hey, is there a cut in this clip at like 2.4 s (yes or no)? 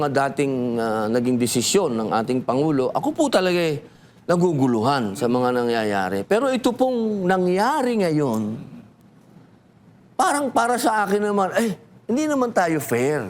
yes